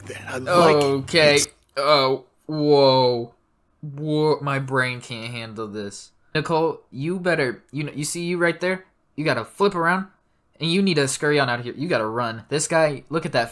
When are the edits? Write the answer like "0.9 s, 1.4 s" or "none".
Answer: none

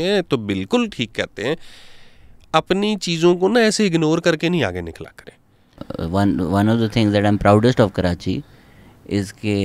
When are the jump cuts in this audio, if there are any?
5.8 s

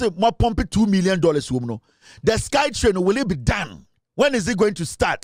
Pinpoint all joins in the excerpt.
none

